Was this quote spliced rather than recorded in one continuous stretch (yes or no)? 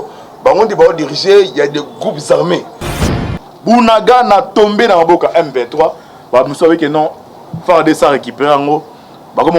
yes